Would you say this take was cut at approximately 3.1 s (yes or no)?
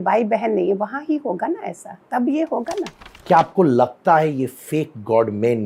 yes